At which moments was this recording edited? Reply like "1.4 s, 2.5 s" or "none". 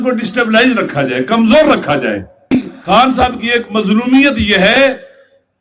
2.5 s